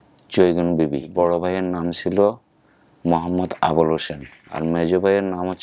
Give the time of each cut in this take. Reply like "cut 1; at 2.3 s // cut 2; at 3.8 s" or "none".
cut 1; at 1.1 s // cut 2; at 4.4 s